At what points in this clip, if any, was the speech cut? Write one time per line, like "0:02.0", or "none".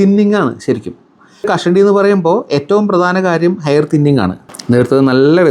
0:01.5
0:04.5

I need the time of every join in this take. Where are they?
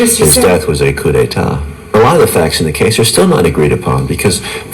0:01.9

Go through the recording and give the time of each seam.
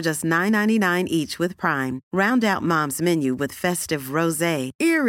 none

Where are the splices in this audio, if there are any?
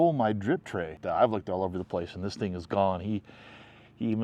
0:00.9

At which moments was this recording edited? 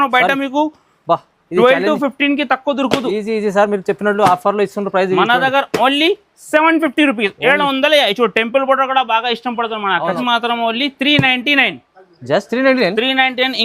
0:10.2

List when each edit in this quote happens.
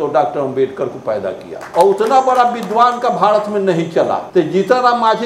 0:01.5
0:04.2

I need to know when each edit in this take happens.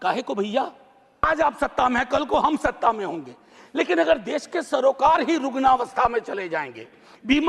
0:01.3

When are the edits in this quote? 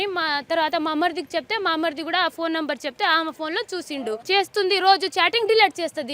0:04.2

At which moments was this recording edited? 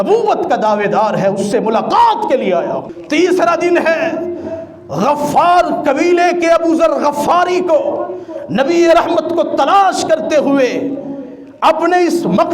0:02.9

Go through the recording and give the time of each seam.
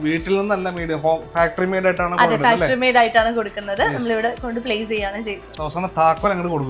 0:05.5

